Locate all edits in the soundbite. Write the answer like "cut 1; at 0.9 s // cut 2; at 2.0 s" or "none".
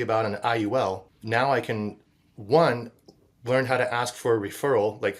cut 1; at 1.1 s